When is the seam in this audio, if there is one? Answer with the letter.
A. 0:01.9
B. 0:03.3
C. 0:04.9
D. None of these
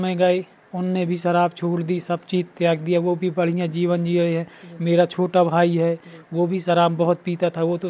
D